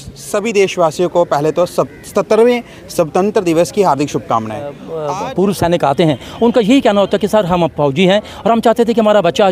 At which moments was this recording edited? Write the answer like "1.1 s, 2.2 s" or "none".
4.9 s